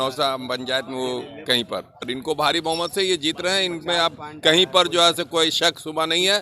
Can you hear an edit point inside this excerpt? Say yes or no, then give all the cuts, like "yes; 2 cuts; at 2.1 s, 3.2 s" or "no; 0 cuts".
yes; 1 cut; at 2.1 s